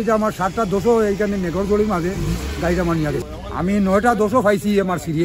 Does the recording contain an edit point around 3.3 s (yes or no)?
yes